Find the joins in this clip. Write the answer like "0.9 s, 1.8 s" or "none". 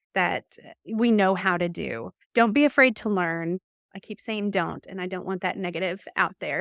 none